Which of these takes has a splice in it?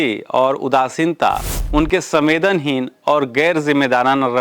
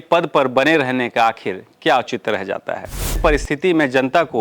second; 1 cut; at 3.2 s

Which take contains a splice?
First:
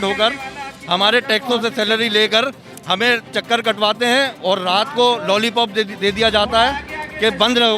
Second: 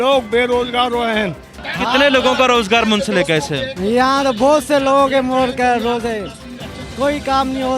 second; 1 cut; at 1.4 s

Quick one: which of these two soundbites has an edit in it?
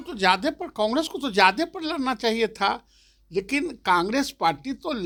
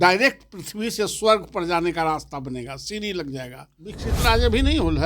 second; 1 cut; at 4.0 s

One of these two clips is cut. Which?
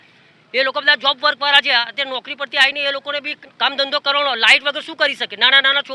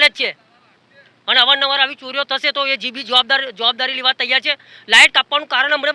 first; 1 cut; at 3.4 s

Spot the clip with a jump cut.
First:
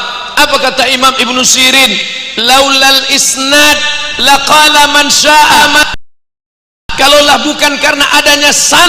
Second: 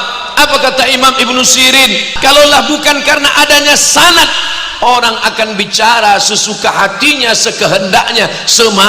second; 1 cut; at 2.0 s

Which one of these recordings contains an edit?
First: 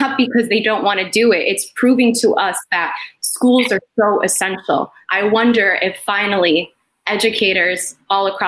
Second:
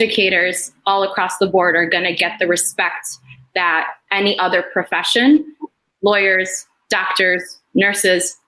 first; 1 cut; at 5.0 s

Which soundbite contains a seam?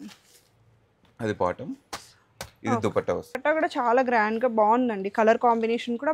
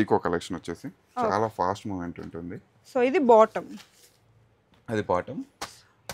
first; 1 cut; at 3.4 s

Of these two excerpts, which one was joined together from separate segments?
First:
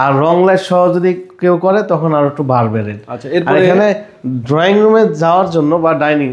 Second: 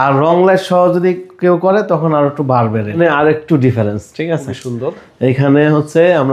second; 1 cut; at 3.0 s

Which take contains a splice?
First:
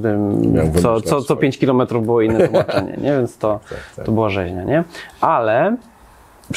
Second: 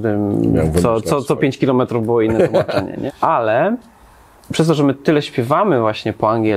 second; 1 cut; at 3.0 s

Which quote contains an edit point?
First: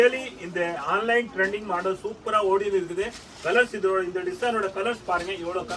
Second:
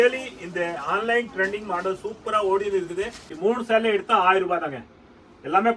second; 1 cut; at 3.3 s

